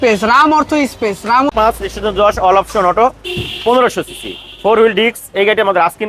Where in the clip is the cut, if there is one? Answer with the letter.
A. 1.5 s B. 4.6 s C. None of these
A